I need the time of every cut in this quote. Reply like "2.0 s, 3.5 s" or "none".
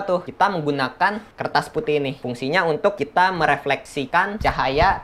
2.2 s